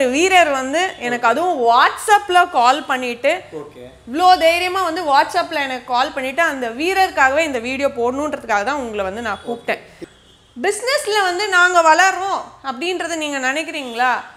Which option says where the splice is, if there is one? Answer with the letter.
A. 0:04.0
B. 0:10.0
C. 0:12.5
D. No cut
B